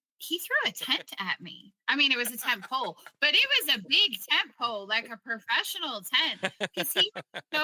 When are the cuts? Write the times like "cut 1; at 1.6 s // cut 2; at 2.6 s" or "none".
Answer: none